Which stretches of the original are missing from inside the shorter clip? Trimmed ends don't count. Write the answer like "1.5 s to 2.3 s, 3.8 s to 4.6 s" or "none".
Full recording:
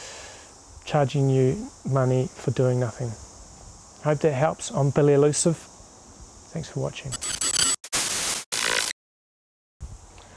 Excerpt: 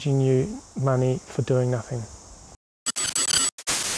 3.9 s to 7.1 s

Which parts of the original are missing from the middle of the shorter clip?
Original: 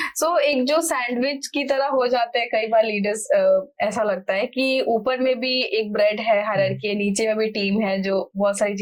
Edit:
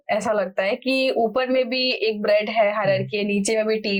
none

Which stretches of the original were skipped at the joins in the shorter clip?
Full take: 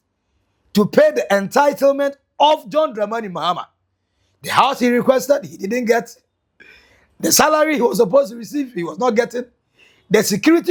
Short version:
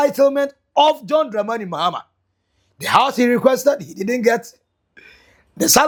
none

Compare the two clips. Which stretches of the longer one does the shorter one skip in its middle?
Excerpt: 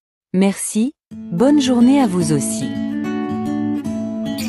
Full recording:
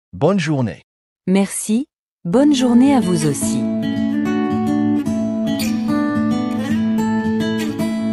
3.4 s to 3.6 s

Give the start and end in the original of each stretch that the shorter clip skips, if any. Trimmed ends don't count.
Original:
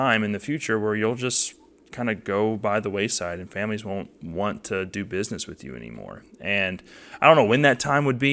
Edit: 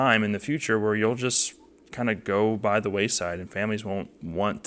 none

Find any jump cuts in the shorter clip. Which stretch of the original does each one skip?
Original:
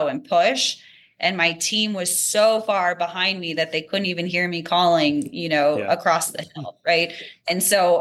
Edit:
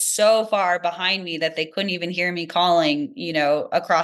none

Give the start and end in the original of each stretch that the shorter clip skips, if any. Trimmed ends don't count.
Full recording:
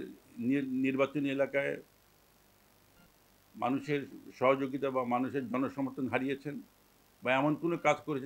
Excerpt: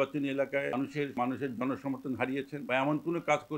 2.2 s to 5.1 s, 6.5 s to 7.1 s

